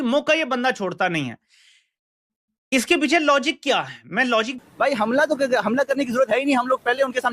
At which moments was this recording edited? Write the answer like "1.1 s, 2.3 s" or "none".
4.5 s